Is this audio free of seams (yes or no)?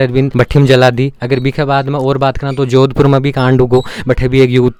yes